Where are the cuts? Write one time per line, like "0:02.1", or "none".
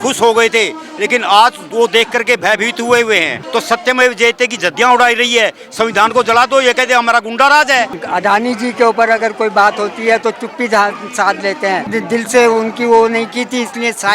0:03.4
0:08.0
0:11.9